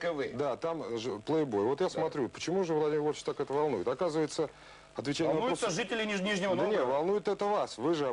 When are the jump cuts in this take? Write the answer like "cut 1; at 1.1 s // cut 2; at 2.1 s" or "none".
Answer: cut 1; at 6.7 s